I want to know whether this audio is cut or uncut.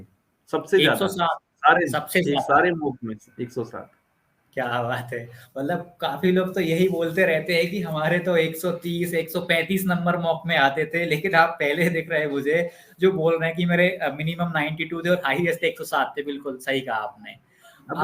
uncut